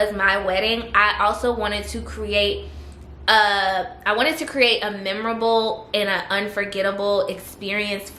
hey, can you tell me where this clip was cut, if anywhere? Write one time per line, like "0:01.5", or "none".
none